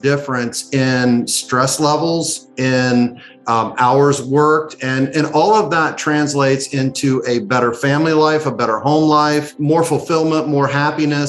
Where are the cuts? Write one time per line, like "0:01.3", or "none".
0:09.5